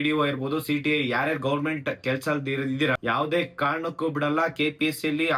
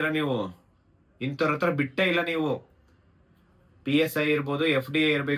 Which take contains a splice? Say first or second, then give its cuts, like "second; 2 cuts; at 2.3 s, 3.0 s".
first; 1 cut; at 3.0 s